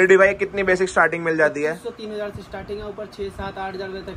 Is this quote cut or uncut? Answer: uncut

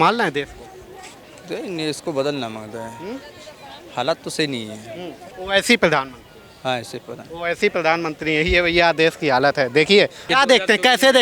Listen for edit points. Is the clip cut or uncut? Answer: cut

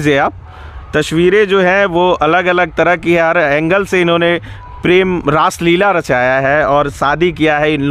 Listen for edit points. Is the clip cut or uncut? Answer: uncut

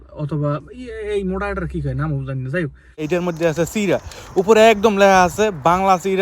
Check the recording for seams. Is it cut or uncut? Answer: cut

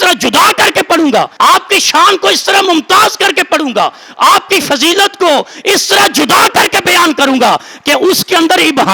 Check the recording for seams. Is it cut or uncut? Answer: uncut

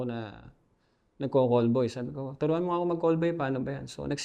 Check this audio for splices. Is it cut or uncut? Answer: uncut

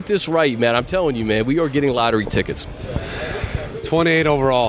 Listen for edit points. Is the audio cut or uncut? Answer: uncut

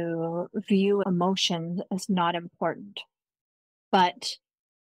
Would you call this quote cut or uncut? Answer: cut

